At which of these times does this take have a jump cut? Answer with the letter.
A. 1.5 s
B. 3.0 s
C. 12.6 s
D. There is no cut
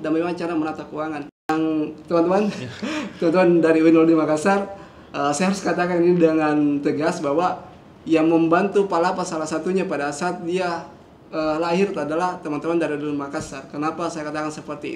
A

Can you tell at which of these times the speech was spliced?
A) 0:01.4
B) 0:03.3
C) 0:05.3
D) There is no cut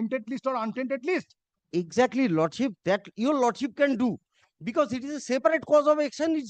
D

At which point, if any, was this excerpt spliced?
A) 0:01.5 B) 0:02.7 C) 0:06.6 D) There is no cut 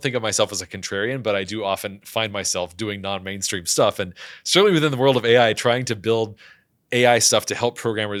D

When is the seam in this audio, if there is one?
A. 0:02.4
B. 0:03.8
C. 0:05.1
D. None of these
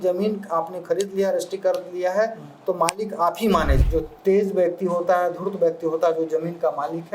B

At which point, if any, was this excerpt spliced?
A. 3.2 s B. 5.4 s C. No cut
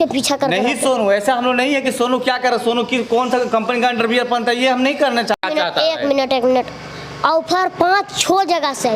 B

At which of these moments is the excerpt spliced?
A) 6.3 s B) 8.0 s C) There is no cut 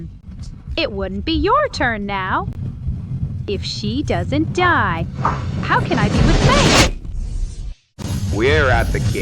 B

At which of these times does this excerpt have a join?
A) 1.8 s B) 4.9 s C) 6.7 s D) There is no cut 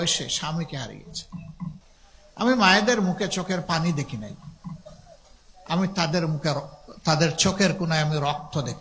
A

